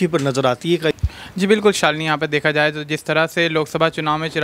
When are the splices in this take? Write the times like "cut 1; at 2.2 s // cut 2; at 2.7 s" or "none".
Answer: cut 1; at 0.9 s